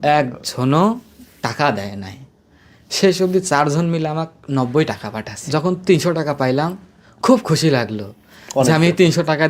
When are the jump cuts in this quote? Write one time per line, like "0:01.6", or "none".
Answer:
0:05.4

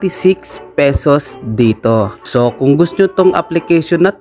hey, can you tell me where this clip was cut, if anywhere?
0:02.2

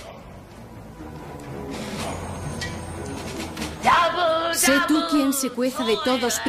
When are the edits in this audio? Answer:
none

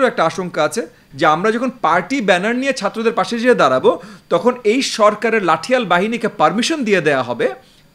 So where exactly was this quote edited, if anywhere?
0:01.0

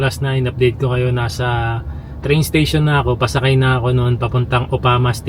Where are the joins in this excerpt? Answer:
none

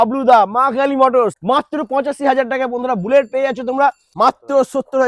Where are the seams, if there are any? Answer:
0:01.4
0:04.0

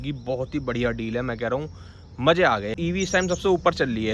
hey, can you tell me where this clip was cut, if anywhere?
0:02.8

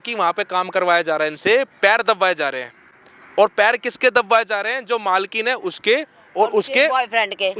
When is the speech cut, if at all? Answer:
none

